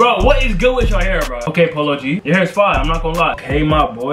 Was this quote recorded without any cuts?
no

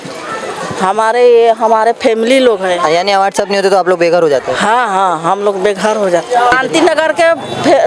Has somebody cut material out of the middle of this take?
yes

